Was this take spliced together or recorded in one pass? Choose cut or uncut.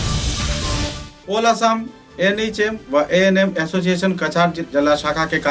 uncut